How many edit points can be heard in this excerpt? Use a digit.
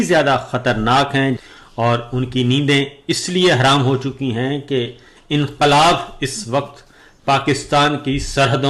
1